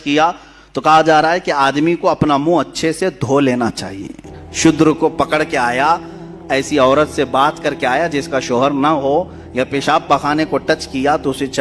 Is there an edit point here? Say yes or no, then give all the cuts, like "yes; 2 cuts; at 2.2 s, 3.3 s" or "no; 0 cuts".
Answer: no; 0 cuts